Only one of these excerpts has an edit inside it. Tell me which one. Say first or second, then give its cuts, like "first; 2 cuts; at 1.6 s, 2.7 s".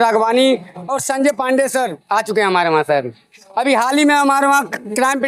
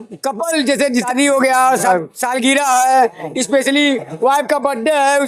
second; 2 cuts; at 1.1 s, 1.9 s